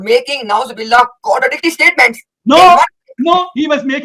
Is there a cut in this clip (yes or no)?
no